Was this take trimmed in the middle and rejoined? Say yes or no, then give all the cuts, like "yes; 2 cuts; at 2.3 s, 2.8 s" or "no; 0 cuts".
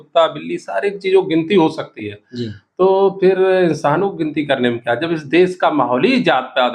no; 0 cuts